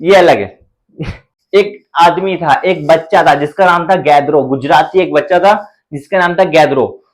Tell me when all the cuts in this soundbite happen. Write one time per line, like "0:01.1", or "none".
0:01.2